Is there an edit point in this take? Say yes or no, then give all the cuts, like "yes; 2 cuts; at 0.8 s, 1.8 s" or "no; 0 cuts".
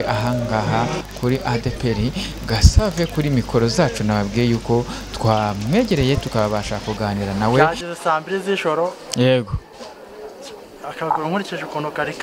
yes; 1 cut; at 7.6 s